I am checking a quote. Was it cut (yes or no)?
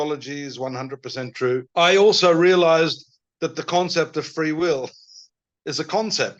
yes